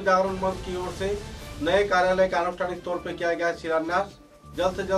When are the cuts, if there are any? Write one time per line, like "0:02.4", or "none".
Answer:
none